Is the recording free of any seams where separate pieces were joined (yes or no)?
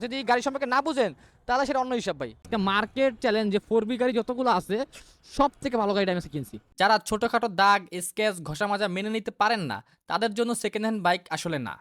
no